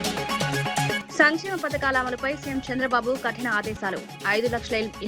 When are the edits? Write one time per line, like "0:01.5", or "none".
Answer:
0:01.0